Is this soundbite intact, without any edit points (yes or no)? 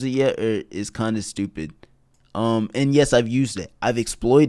yes